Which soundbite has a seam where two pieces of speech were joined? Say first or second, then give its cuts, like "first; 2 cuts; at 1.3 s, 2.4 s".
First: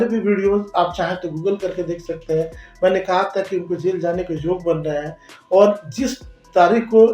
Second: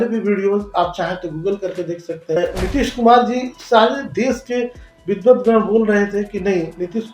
second; 1 cut; at 2.4 s